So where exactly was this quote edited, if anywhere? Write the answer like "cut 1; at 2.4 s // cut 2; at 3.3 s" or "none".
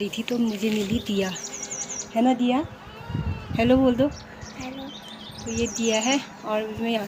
none